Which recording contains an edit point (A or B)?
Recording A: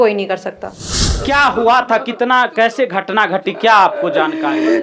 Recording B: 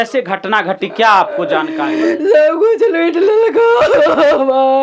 A